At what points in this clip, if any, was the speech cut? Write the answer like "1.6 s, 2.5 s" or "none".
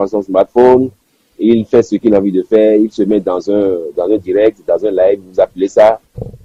none